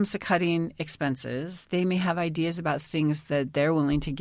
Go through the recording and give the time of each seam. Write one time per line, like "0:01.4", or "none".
none